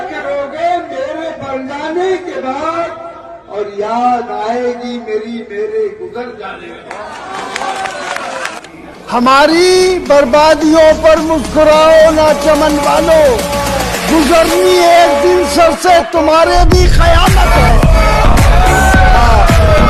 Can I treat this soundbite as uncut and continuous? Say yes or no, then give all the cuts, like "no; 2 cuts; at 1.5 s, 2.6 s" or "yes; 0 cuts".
yes; 0 cuts